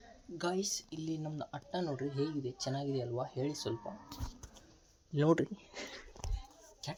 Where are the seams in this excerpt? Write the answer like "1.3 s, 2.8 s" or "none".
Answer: none